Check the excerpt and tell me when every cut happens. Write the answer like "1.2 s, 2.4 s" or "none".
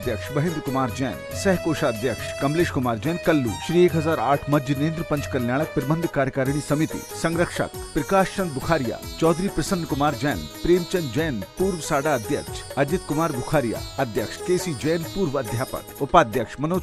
none

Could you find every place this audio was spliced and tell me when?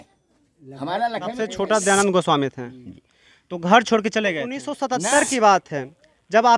1.4 s, 4.7 s

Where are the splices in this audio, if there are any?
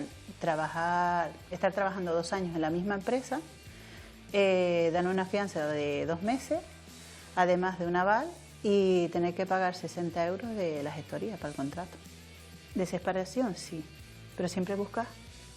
12.3 s

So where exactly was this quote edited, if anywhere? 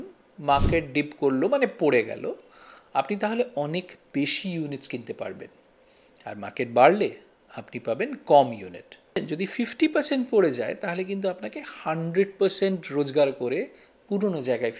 9.1 s

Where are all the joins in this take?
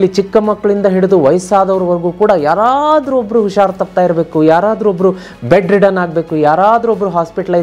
none

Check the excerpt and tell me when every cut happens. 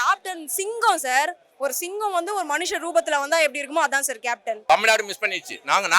4.6 s

